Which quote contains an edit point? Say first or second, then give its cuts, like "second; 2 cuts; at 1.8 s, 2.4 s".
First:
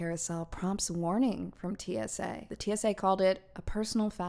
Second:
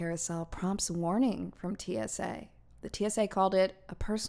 first; 1 cut; at 2.5 s